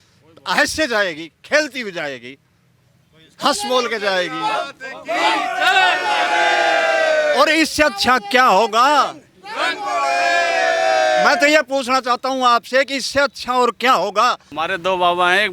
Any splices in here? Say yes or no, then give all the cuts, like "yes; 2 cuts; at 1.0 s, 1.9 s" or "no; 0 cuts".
yes; 1 cut; at 14.5 s